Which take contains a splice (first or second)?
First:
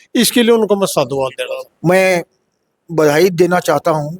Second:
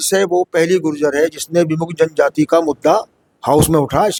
first